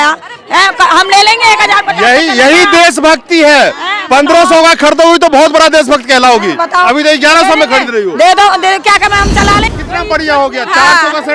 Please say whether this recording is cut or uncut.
cut